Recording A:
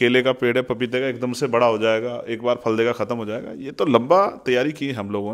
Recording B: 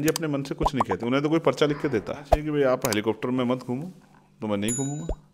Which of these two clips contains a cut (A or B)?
B